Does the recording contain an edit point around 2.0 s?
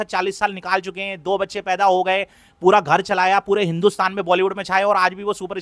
no; 0 cuts

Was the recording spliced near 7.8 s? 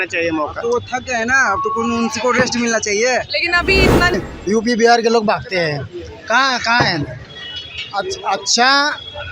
no; 1 cut; at 4.1 s

